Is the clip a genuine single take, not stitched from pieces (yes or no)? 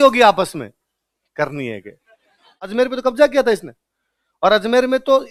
no